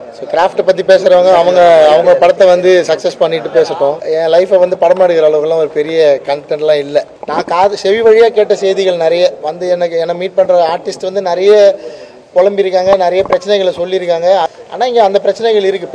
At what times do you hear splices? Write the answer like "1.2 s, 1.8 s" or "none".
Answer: 4.0 s, 7.2 s, 14.5 s

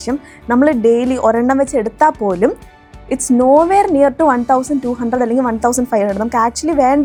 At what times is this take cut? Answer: none

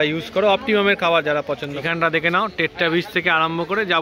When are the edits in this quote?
1.8 s

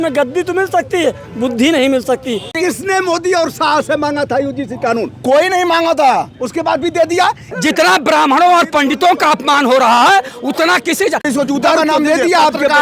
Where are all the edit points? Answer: 2.5 s, 7.4 s, 11.3 s

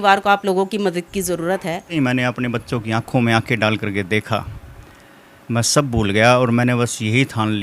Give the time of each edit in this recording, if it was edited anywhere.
1.9 s

